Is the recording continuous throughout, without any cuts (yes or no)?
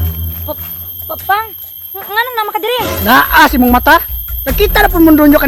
yes